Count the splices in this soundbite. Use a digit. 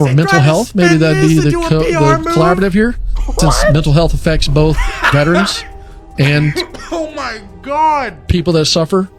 0